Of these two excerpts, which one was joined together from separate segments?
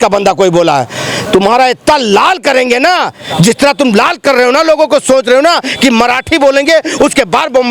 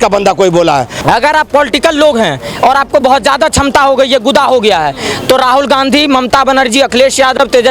second; 1 cut; at 0.9 s

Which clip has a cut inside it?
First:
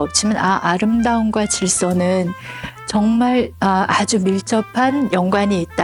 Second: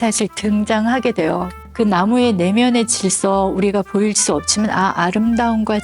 second; 1 cut; at 1.6 s

